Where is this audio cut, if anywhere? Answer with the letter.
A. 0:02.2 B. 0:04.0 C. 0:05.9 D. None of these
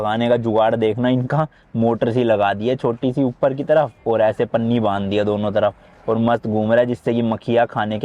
D